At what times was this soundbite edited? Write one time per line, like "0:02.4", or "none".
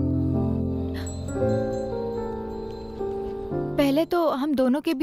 0:03.7